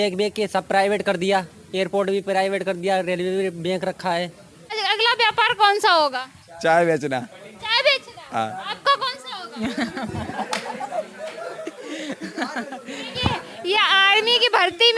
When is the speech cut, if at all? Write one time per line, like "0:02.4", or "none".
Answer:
0:04.8